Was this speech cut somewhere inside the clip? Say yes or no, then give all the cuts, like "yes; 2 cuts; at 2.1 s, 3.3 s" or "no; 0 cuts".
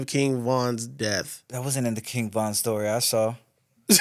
yes; 1 cut; at 1.5 s